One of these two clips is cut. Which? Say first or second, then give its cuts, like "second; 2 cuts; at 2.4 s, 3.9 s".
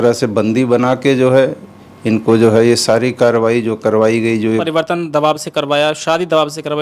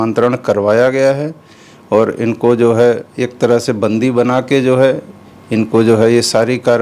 first; 1 cut; at 4.6 s